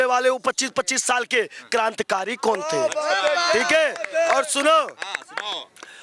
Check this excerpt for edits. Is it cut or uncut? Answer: uncut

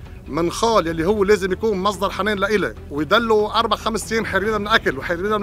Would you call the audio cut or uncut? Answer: cut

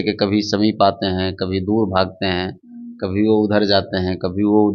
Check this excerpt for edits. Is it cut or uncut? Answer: uncut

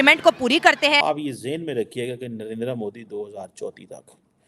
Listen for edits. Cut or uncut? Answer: cut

